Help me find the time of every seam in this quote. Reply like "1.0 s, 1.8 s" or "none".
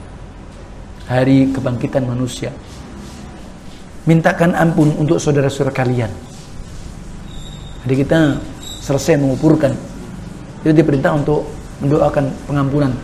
3.4 s